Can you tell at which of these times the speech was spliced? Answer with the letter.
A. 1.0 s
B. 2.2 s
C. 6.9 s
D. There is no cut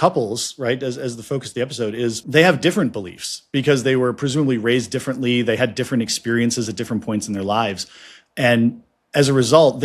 B